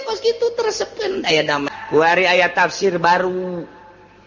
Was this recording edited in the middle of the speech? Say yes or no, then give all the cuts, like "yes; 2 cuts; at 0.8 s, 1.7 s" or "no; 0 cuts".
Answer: yes; 1 cut; at 1.7 s